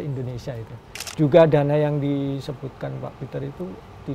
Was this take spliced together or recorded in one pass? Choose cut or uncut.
cut